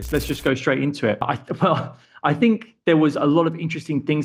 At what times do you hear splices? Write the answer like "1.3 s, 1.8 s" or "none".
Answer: 1.2 s